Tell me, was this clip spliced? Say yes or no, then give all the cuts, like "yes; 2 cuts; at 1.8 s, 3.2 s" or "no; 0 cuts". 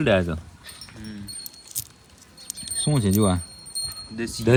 no; 0 cuts